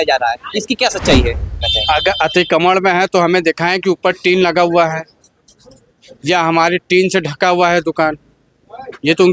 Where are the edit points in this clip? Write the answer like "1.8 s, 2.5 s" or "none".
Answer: 1.7 s